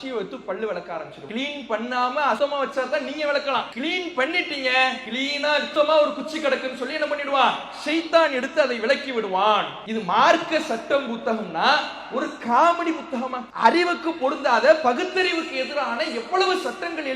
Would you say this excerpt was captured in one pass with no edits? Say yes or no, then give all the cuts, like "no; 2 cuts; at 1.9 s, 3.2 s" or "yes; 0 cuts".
no; 6 cuts; at 1.2 s, 2.4 s, 3.7 s, 5.4 s, 9.8 s, 13.4 s